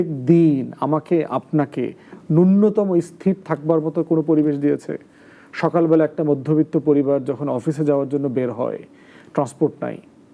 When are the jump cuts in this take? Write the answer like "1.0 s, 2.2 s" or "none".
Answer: none